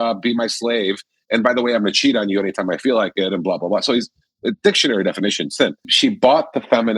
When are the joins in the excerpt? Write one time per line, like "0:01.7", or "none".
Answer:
0:05.9